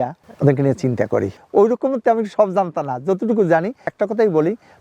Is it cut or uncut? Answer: cut